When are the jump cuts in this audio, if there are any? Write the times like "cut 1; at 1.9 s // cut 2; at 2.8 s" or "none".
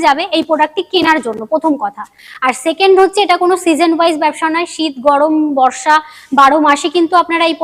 none